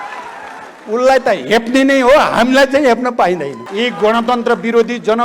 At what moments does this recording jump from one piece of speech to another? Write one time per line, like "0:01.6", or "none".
0:03.6